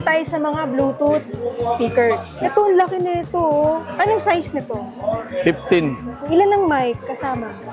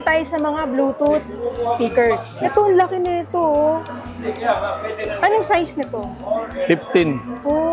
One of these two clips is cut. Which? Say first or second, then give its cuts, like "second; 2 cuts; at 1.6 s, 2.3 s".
first; 2 cuts; at 3.9 s, 6.1 s